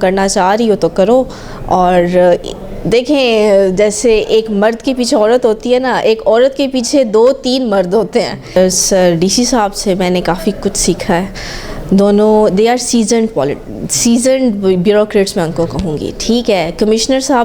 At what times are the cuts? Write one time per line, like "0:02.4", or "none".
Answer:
0:08.6